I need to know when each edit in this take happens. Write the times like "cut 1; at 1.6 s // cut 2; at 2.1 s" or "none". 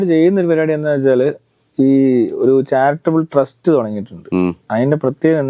none